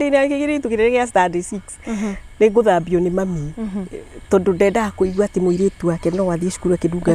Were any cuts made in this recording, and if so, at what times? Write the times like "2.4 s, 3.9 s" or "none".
none